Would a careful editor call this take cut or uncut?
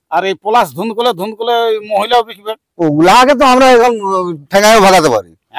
uncut